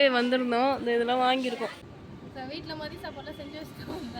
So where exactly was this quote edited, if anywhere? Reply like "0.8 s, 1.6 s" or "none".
1.8 s

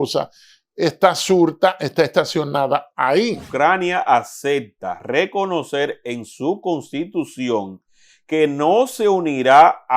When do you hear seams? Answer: 3.5 s

